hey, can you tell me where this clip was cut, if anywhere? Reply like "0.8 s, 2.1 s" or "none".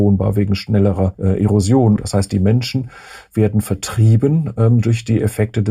1.2 s, 2.0 s

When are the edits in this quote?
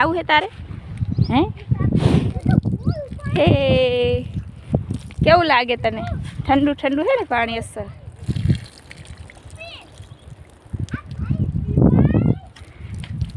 none

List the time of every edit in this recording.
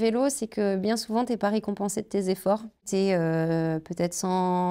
2.9 s

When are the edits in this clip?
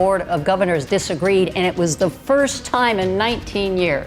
none

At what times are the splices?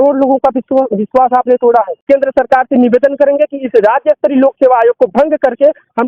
2.0 s

